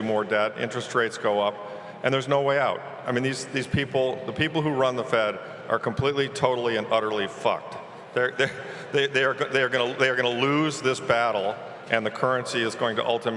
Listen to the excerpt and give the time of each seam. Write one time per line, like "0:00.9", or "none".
none

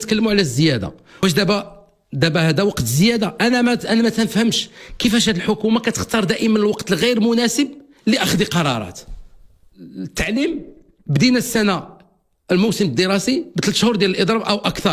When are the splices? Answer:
0:01.2
0:10.0

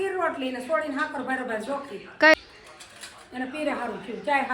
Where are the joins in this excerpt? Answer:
0:02.3

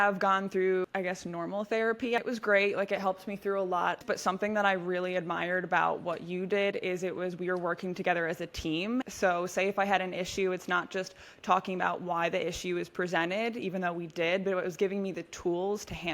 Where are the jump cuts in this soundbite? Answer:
0:00.8
0:02.2
0:04.0
0:09.1

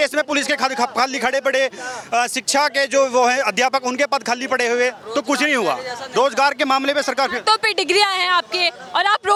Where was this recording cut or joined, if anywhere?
none

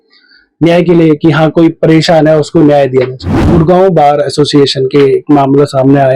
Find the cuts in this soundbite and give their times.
0:03.4

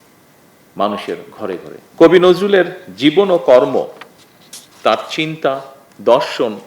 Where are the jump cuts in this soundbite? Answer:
0:01.8

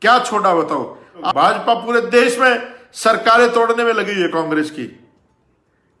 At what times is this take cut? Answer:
0:01.3

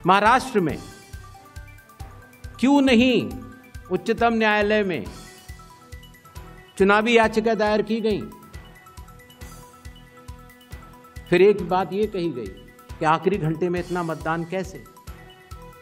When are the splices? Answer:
0:01.0
0:02.6

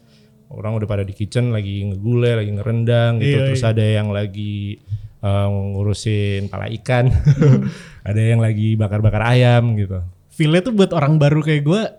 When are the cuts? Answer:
none

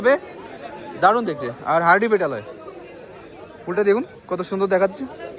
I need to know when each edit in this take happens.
none

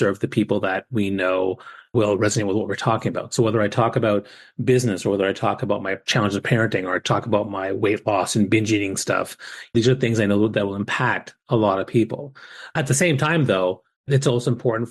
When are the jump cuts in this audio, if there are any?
0:01.9
0:06.0
0:09.7
0:12.7
0:14.1

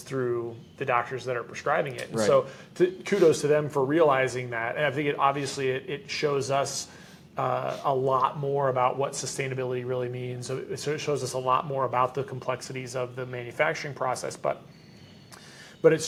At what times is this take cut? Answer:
none

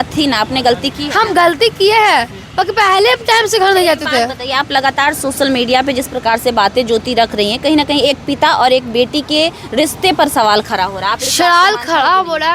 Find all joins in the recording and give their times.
none

